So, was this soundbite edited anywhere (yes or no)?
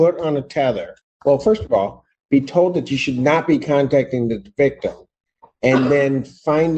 no